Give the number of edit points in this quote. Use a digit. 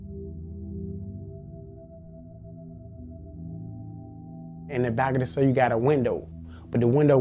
0